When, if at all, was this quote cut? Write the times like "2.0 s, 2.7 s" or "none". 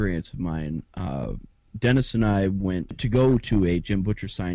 3.0 s